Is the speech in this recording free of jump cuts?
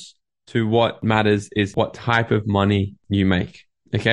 no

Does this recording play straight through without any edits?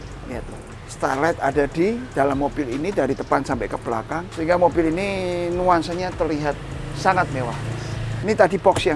yes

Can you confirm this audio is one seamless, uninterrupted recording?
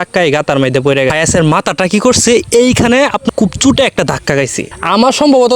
no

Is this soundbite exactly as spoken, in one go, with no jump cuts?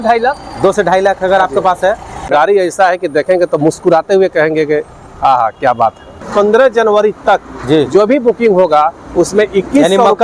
no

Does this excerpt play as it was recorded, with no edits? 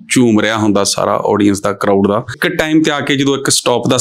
no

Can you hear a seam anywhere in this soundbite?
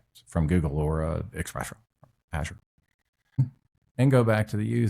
yes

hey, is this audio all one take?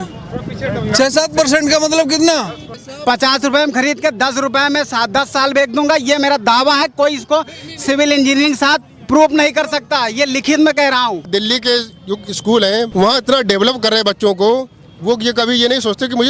no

